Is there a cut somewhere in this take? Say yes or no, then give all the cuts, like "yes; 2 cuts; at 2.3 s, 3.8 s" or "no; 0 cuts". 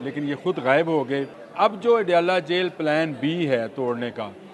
yes; 1 cut; at 1.4 s